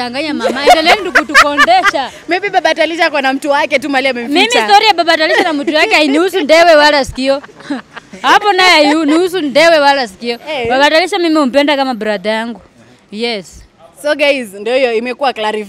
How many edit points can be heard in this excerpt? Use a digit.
0